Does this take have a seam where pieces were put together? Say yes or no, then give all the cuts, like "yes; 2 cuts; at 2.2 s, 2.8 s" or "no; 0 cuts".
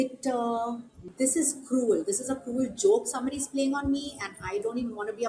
yes; 1 cut; at 0.9 s